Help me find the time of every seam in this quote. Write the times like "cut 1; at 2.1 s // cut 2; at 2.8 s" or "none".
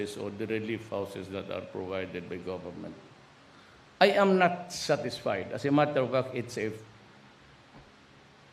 none